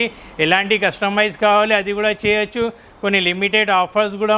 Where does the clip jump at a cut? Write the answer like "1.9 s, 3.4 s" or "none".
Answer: none